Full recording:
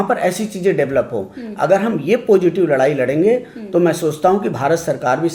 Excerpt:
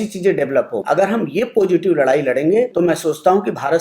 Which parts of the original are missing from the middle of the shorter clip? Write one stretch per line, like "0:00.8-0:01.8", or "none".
0:01.2-0:01.5
0:03.4-0:03.7